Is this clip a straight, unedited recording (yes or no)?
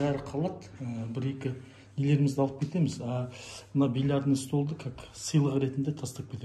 yes